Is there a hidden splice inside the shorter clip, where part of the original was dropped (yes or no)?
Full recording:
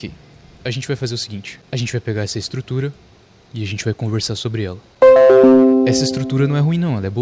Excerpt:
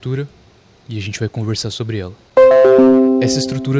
no